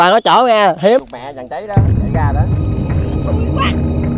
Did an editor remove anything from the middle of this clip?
yes; 1 cut; at 1.0 s

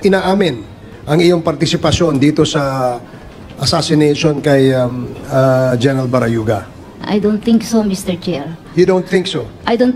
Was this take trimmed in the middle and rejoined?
yes; 1 cut; at 7.0 s

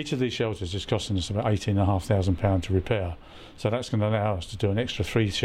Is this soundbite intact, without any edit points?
yes; 0 cuts

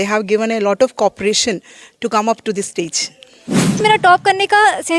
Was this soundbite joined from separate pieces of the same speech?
yes; 1 cut; at 3.8 s

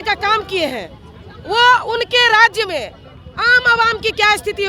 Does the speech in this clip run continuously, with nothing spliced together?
yes; 0 cuts

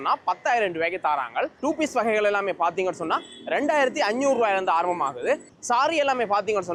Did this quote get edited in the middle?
no; 0 cuts

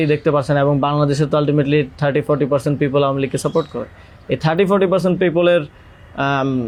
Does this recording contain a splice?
no; 0 cuts

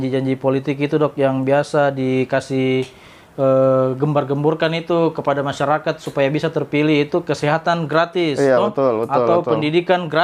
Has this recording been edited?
no; 0 cuts

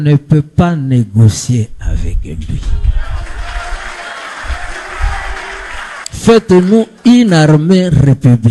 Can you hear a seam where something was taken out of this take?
yes; 1 cut; at 5.9 s

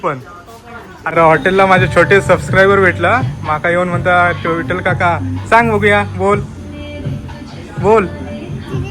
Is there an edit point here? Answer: yes; 1 cut; at 1.1 s

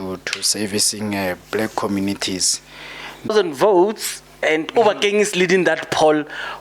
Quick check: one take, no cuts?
no; 1 cut; at 3.3 s

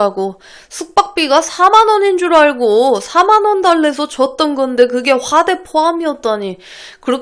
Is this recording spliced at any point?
no; 0 cuts

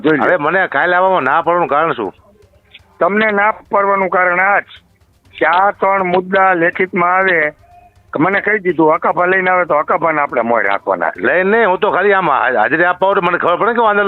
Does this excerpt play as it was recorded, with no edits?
yes; 0 cuts

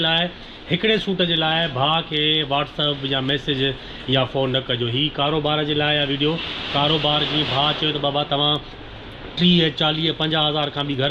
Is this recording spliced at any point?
no; 0 cuts

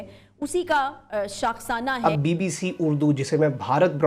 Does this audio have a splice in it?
yes; 1 cut; at 2.0 s

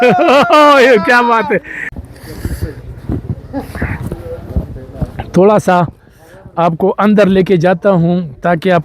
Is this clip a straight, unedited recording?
no; 1 cut; at 2.0 s

